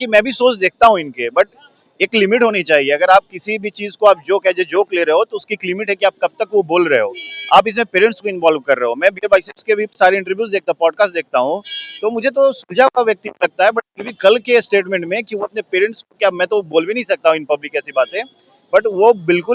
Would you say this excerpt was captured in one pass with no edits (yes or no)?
yes